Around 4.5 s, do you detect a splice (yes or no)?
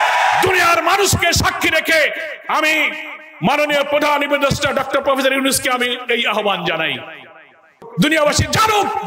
no